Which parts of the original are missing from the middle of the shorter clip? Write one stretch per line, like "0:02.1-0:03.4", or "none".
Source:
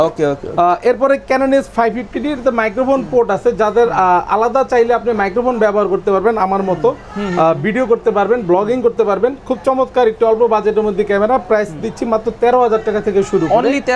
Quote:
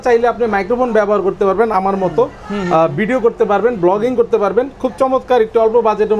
none

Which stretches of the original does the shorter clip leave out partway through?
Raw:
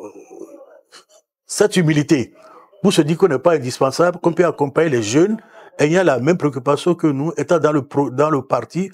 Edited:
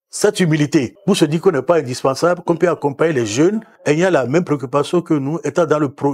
0:02.3-0:02.7
0:05.5-0:05.6

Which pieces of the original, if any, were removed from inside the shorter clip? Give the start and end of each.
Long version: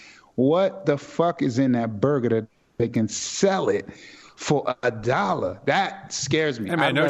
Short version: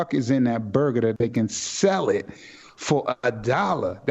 0:02.4-0:02.8

